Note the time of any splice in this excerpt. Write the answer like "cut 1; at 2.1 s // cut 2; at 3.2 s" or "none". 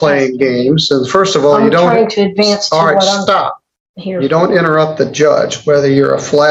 none